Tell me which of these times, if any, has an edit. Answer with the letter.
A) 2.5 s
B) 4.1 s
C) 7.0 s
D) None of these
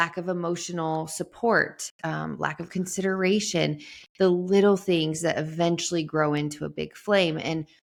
D